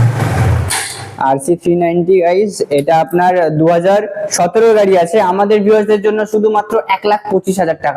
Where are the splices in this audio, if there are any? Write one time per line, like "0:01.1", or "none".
none